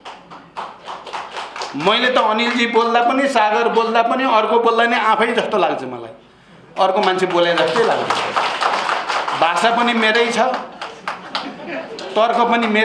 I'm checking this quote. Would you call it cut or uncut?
uncut